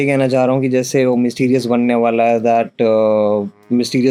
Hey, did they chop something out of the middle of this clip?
no; 0 cuts

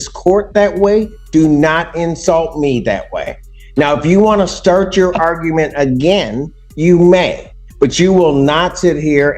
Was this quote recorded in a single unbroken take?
yes; 0 cuts

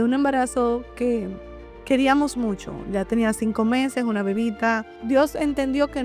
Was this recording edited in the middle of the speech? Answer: yes; 1 cut; at 4.9 s

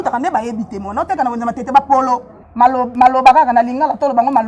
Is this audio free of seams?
no; 1 cut; at 2.4 s

